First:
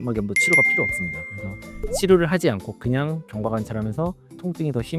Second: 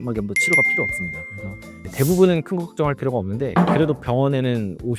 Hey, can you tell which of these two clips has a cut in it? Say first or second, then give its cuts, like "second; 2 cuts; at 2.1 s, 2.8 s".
second; 1 cut; at 1.7 s